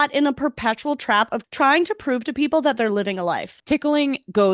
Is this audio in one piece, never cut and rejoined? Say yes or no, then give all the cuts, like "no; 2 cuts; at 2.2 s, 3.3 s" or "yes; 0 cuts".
no; 2 cuts; at 1.4 s, 3.5 s